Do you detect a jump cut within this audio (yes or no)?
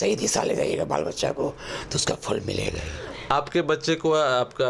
no